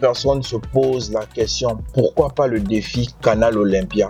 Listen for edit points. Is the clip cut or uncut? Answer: uncut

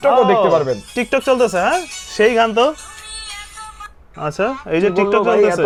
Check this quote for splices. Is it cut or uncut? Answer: uncut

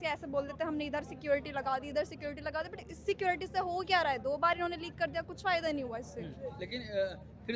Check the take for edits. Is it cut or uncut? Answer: uncut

